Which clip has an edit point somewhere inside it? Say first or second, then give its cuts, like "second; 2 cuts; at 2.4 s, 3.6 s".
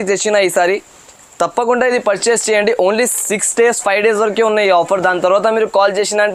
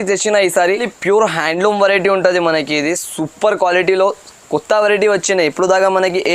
second; 1 cut; at 0.9 s